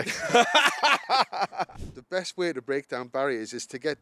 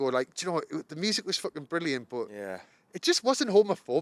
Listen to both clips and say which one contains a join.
first; 1 cut; at 1.7 s

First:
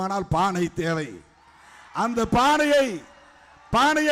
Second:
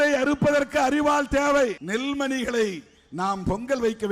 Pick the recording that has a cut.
second; 1 cut; at 1.8 s

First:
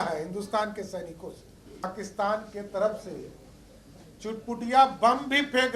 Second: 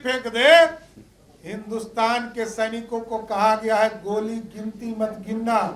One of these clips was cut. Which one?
first; 1 cut; at 1.8 s

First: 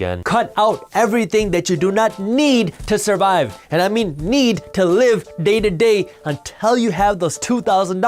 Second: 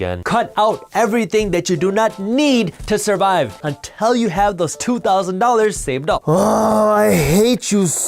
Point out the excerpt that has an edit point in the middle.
second; 2 cuts; at 3.6 s, 6.2 s

